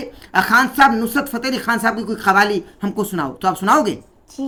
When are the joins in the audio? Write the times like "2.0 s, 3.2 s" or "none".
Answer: none